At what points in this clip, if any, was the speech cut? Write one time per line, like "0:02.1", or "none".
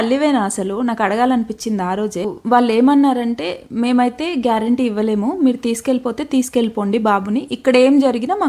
0:02.3